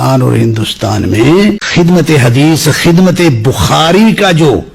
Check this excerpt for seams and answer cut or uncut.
cut